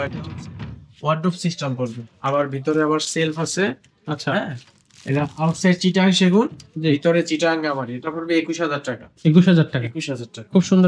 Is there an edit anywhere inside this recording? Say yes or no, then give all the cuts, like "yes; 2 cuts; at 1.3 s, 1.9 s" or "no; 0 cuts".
no; 0 cuts